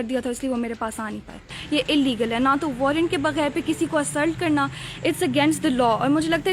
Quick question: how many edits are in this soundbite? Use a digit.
1